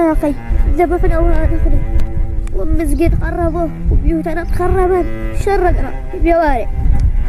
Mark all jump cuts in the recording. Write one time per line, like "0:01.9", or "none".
none